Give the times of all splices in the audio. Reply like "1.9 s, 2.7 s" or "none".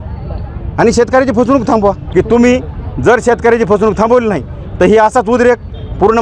2.0 s